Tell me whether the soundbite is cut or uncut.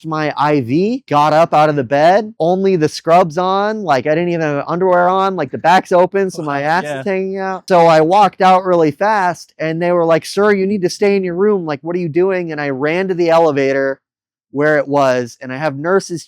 cut